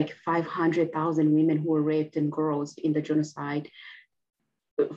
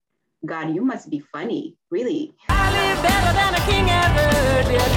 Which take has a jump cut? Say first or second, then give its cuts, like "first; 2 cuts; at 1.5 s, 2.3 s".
second; 1 cut; at 2.4 s